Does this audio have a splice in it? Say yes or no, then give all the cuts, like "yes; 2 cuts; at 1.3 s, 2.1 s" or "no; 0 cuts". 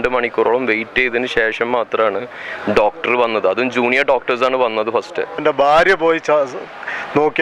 yes; 1 cut; at 5.4 s